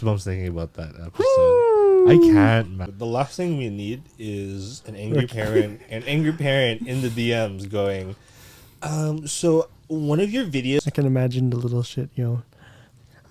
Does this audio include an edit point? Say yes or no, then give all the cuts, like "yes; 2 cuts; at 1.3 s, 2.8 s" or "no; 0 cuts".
yes; 2 cuts; at 2.9 s, 10.8 s